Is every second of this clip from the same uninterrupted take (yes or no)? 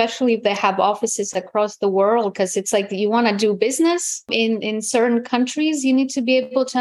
no